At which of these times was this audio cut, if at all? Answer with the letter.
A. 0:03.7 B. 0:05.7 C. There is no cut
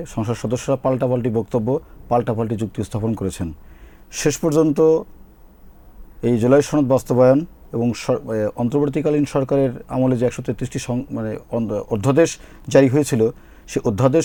C